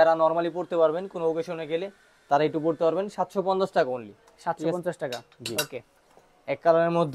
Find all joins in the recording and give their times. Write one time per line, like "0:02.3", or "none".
none